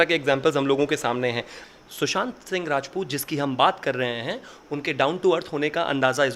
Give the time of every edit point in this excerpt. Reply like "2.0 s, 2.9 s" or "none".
1.5 s